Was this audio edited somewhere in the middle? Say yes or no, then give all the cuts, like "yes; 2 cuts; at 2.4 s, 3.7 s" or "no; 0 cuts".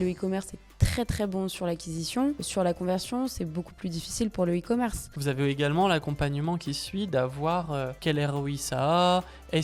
yes; 3 cuts; at 2.5 s, 5.1 s, 7.9 s